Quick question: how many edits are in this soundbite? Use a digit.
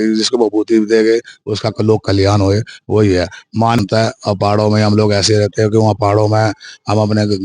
1